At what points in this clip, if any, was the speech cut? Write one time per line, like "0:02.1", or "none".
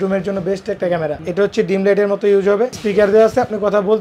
0:01.2
0:02.8

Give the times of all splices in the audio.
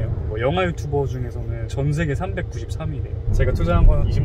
0:03.3

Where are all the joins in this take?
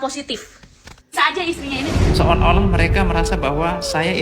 0:02.0

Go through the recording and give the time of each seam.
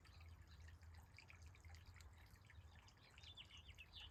none

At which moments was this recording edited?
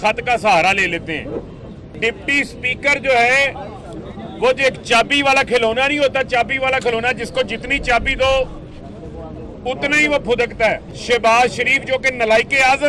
0:02.0
0:10.9

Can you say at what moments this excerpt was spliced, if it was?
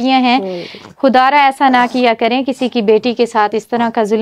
none

